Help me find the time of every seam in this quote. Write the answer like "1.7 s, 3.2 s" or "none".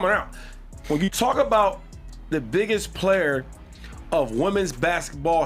2.9 s